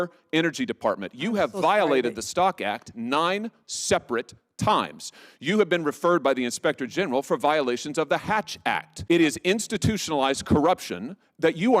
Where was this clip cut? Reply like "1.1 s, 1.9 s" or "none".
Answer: 8.9 s